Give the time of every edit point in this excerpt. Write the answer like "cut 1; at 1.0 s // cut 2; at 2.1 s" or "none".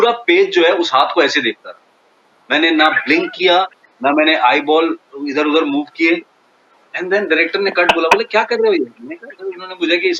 none